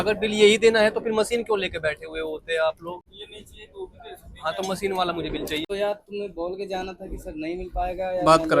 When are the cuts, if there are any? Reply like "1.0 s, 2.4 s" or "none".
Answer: 3.1 s, 5.6 s

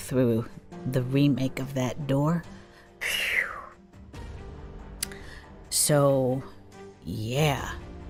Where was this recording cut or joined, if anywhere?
none

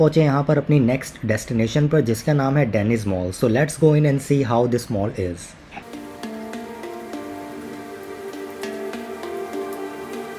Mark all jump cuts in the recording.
none

